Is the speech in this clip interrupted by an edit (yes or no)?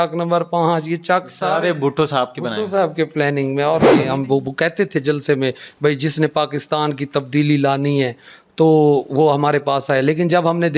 yes